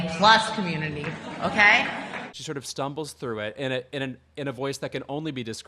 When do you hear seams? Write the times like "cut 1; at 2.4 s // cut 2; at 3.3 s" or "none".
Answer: none